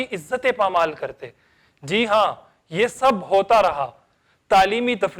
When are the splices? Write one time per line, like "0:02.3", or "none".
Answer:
none